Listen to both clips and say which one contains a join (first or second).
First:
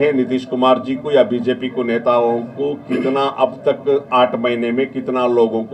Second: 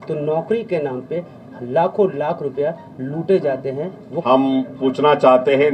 second